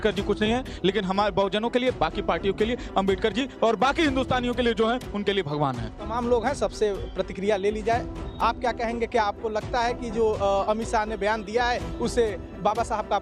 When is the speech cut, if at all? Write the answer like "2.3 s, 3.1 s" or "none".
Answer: none